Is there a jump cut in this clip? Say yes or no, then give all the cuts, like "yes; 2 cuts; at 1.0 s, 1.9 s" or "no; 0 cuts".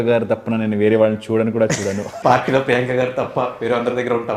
yes; 1 cut; at 2.1 s